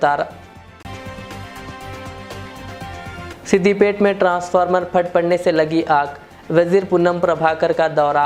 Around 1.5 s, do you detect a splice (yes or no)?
no